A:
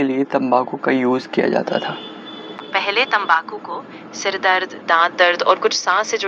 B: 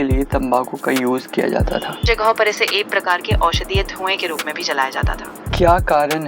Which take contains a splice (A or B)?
B